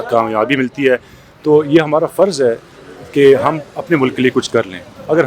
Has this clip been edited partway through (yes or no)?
no